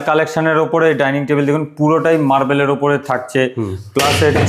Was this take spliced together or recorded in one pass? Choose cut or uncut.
uncut